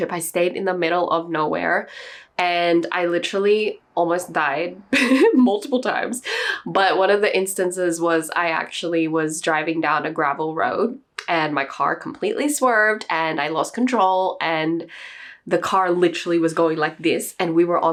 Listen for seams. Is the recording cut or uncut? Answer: uncut